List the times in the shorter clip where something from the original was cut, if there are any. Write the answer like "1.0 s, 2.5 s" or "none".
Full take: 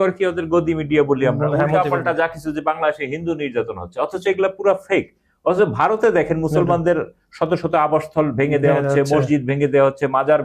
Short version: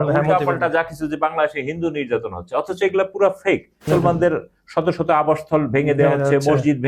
3.8 s